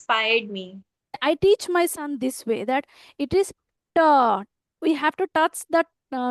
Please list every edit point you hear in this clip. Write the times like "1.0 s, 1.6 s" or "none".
1.2 s